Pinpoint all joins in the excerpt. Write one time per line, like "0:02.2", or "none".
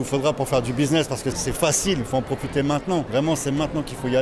0:01.4
0:03.1